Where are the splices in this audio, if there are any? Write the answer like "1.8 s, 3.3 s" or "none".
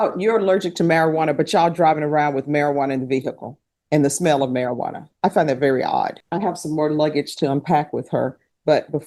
6.2 s